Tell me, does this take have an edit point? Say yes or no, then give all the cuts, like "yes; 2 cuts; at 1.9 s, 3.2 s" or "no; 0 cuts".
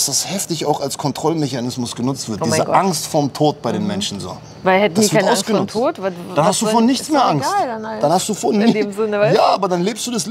no; 0 cuts